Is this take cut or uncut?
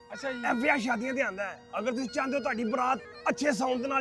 uncut